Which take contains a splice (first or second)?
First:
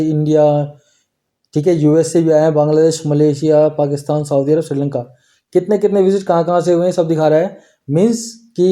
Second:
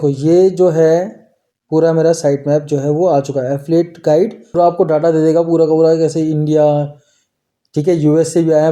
second